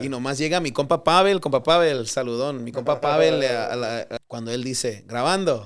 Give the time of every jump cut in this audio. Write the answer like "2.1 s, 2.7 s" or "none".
4.2 s